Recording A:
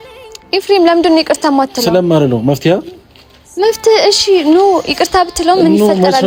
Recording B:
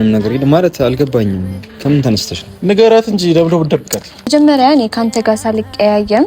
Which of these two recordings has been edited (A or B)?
B